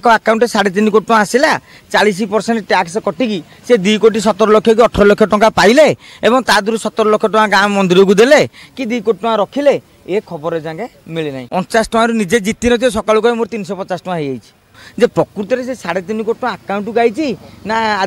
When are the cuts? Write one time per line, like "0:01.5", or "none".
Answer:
0:11.4
0:14.8